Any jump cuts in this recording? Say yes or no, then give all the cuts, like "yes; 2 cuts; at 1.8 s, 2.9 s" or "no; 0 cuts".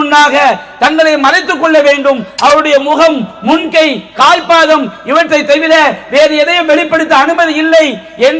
no; 0 cuts